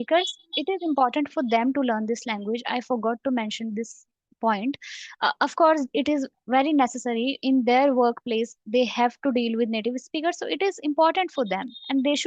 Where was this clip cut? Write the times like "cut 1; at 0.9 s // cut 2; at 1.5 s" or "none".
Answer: none